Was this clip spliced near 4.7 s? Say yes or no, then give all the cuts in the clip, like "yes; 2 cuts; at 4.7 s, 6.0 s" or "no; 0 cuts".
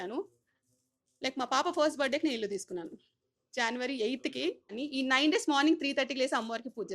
yes; 1 cut; at 4.7 s